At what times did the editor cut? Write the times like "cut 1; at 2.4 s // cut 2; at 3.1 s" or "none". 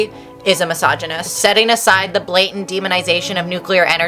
cut 1; at 1.3 s